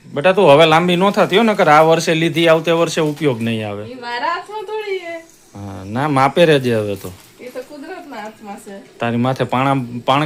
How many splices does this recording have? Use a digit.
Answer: 0